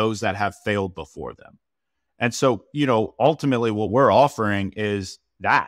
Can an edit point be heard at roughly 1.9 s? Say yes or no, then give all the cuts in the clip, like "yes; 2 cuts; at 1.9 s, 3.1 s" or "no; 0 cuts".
no; 0 cuts